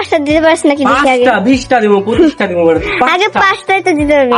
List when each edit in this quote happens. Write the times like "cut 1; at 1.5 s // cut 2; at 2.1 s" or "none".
none